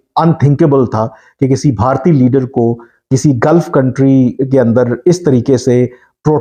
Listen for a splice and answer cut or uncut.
uncut